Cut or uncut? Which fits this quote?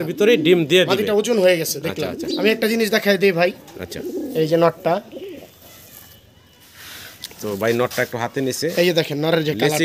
uncut